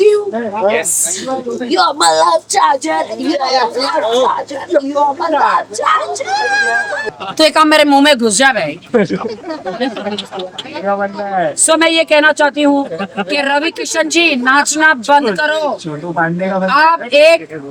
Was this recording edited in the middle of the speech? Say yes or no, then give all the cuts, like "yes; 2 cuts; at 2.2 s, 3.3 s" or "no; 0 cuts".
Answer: yes; 1 cut; at 7.1 s